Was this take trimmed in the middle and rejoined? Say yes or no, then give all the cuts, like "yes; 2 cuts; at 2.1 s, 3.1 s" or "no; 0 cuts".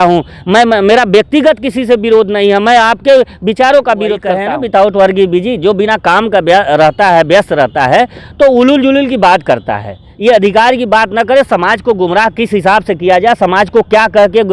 yes; 1 cut; at 4.4 s